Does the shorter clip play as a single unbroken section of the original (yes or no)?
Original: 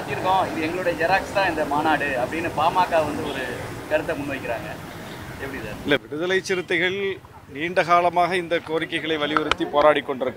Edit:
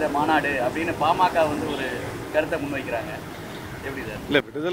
yes